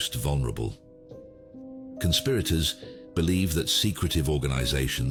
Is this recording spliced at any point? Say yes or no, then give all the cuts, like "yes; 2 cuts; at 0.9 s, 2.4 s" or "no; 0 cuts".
no; 0 cuts